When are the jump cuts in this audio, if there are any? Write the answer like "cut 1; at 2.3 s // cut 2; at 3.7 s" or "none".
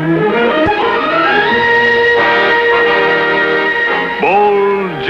cut 1; at 2.0 s

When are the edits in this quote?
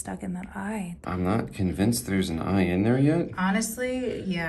cut 1; at 0.9 s

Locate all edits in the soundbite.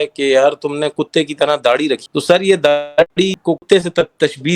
cut 1; at 2.0 s // cut 2; at 3.6 s

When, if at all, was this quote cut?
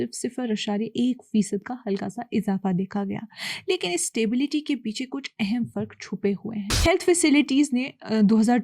cut 1; at 6.7 s

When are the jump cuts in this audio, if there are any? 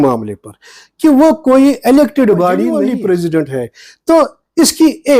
cut 1; at 2.7 s

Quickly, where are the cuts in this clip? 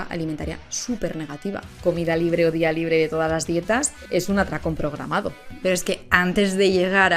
cut 1; at 1.8 s // cut 2; at 4.0 s // cut 3; at 5.6 s

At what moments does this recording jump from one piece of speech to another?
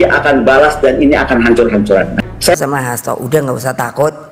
cut 1; at 2.5 s

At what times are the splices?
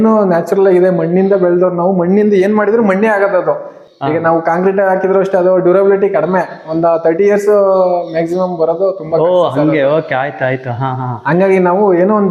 none

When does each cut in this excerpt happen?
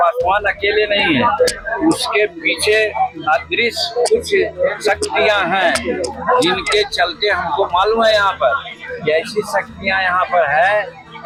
none

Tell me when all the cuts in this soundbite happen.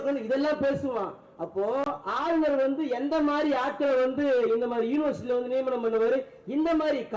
cut 1; at 1.8 s

